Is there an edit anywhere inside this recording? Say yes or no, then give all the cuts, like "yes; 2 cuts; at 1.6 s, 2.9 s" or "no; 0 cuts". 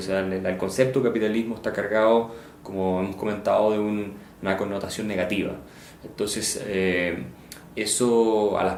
no; 0 cuts